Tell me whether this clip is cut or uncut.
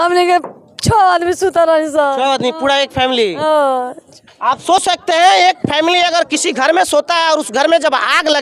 uncut